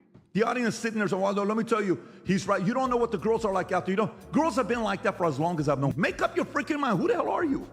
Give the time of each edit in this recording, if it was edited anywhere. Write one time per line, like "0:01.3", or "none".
0:05.9